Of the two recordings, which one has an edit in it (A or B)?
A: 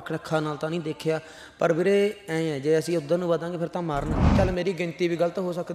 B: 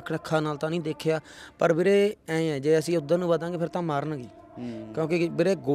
A